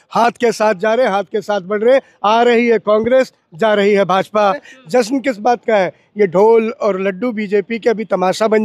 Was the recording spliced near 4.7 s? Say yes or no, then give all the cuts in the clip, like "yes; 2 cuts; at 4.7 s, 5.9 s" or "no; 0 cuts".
yes; 1 cut; at 4.7 s